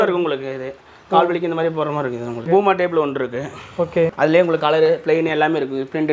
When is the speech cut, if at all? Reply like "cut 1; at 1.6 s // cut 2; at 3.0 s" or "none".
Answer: cut 1; at 2.5 s // cut 2; at 4.1 s

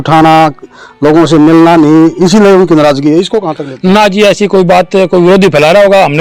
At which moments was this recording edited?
none

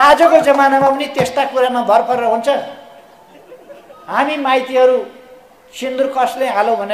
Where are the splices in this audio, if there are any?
none

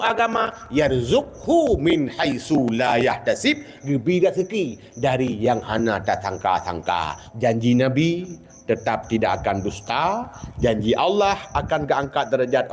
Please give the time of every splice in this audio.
cut 1; at 7.2 s

